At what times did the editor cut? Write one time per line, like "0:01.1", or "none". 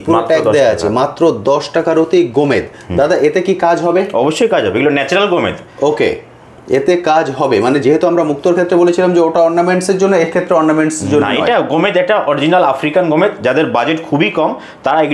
none